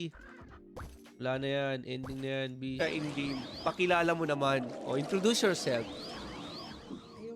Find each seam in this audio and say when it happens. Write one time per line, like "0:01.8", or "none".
0:02.8